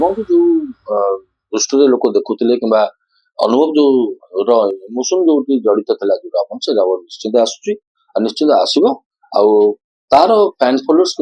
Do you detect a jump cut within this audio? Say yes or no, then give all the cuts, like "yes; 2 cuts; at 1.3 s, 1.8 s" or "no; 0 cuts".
no; 0 cuts